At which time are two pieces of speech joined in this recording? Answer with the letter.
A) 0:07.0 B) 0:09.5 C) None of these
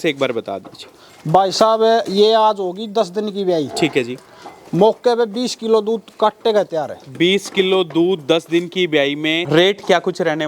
B